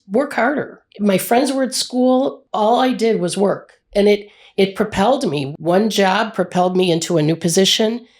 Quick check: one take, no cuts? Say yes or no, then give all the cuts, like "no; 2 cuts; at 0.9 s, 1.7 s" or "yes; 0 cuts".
no; 1 cut; at 2.4 s